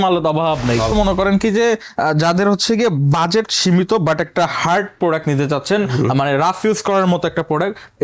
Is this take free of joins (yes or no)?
no